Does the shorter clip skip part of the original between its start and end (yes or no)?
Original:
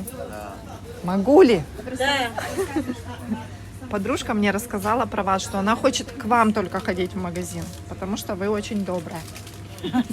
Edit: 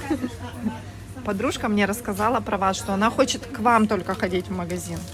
no